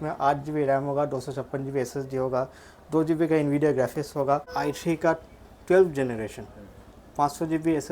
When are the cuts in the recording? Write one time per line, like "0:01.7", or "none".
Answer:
0:04.5